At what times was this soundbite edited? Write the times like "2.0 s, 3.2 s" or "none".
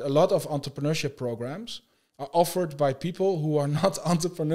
none